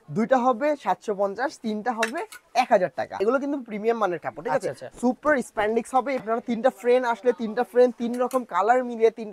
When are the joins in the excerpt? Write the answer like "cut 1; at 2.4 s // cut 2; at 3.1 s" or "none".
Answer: cut 1; at 3.2 s // cut 2; at 6.2 s